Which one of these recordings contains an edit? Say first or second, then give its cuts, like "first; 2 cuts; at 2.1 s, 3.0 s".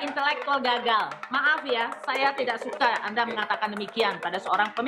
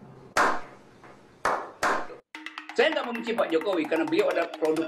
second; 1 cut; at 2.2 s